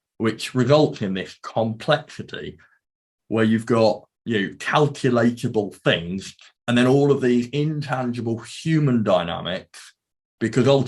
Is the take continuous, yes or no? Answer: no